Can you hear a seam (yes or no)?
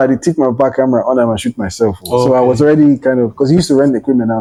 no